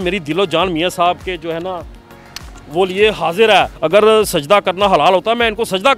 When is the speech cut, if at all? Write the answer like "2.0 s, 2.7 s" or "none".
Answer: 3.8 s